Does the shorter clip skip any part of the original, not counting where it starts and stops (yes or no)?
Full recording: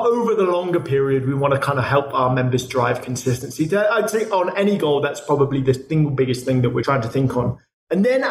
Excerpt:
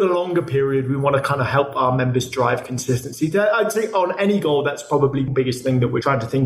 yes